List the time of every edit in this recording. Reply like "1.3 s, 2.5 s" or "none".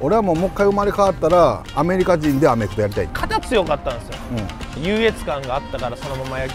3.1 s, 4.7 s